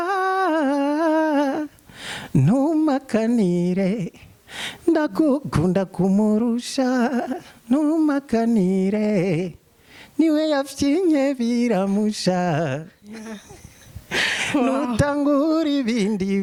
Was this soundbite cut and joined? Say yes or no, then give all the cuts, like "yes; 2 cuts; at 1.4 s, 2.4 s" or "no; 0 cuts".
no; 0 cuts